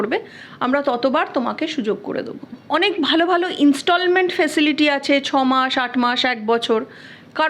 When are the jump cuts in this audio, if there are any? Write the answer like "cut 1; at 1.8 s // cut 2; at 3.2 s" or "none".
cut 1; at 2.6 s